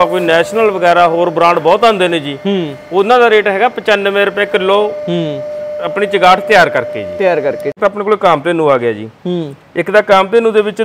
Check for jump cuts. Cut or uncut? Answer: cut